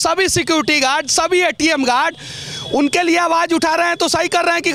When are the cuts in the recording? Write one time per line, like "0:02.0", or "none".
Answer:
none